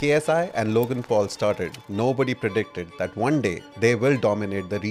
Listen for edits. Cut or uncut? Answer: uncut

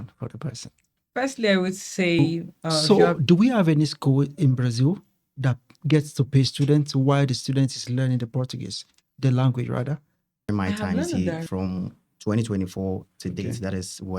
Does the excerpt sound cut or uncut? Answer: cut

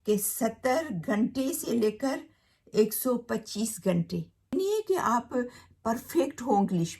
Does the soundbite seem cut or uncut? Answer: cut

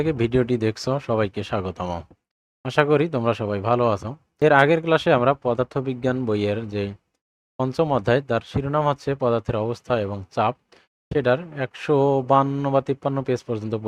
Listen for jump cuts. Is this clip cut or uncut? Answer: cut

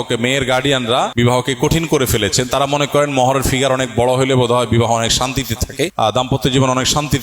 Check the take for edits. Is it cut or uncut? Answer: cut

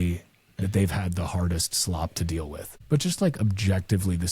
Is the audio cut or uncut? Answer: cut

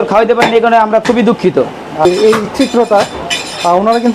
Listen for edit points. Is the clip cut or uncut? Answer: cut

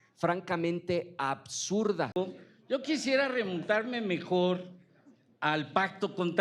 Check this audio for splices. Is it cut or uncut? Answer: cut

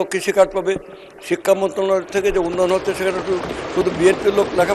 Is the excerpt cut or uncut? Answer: uncut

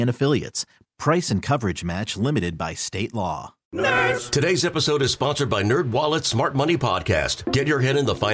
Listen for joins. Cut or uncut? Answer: cut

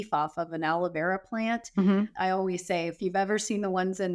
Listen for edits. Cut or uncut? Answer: cut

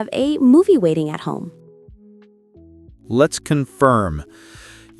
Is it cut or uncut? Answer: cut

